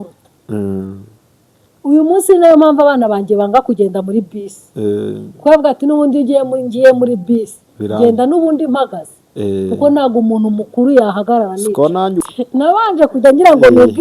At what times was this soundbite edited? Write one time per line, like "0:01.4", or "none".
0:12.2